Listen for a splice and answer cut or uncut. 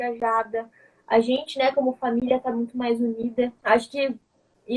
uncut